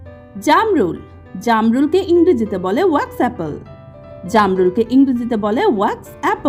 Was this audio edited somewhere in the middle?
no; 0 cuts

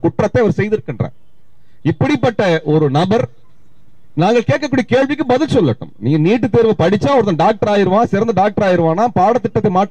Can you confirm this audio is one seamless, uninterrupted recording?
yes; 0 cuts

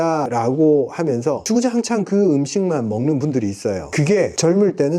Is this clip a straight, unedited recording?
no; 2 cuts; at 1.4 s, 4.2 s

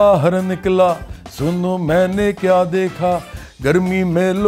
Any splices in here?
no; 0 cuts

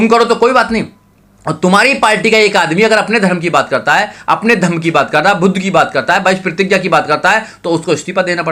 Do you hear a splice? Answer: no; 0 cuts

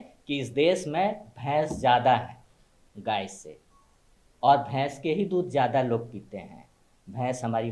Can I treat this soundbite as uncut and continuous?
yes; 0 cuts

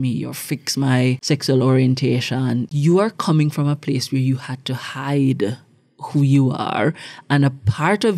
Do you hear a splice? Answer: yes; 2 cuts; at 1.2 s, 2.7 s

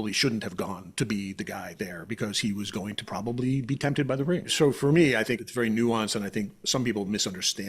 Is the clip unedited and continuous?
no; 2 cuts; at 4.5 s, 5.4 s

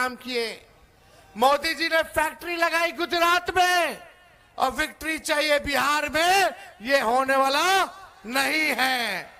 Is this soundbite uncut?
yes; 0 cuts

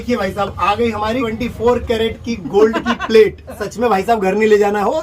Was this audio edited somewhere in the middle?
yes; 1 cut; at 3.7 s

